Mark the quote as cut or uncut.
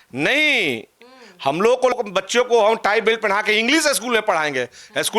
cut